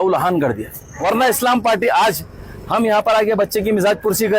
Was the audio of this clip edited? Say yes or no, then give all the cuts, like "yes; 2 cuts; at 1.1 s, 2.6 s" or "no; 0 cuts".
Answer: yes; 1 cut; at 1.0 s